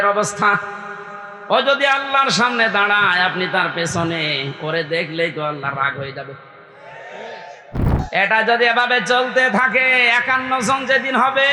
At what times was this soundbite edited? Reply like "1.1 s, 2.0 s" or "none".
8.0 s